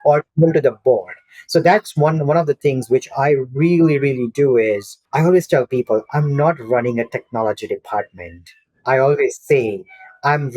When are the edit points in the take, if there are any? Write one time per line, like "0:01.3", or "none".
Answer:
0:05.0